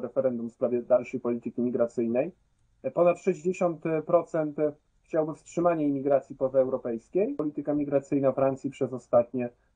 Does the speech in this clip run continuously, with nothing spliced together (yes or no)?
no